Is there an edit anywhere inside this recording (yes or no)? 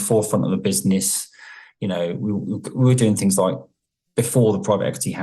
no